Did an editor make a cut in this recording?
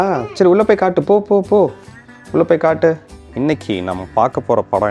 yes; 1 cut; at 3.2 s

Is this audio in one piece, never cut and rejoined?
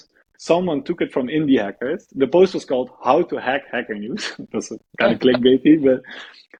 yes; 0 cuts

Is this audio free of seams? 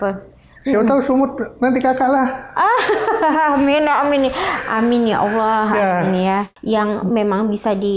no; 1 cut; at 6.5 s

